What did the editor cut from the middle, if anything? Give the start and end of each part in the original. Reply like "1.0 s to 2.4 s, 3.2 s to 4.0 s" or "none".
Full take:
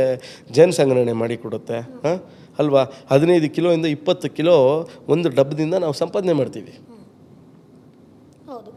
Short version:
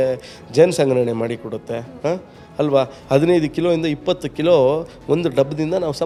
none